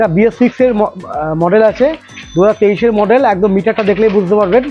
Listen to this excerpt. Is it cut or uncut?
uncut